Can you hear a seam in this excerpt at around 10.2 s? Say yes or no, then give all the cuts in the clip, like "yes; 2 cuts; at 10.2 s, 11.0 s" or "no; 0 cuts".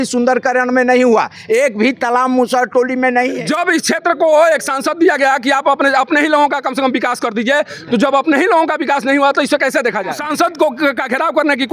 yes; 2 cuts; at 3.4 s, 10.2 s